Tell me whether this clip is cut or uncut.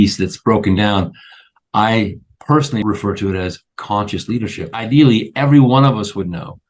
cut